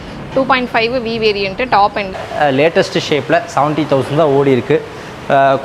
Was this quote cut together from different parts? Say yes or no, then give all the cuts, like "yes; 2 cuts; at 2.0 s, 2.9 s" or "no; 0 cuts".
yes; 1 cut; at 2.2 s